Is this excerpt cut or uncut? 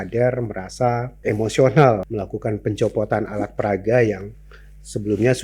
cut